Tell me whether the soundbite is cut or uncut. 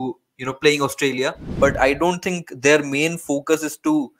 cut